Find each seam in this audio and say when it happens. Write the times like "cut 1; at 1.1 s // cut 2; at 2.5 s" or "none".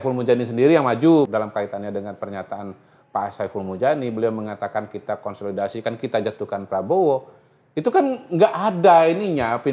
cut 1; at 1.3 s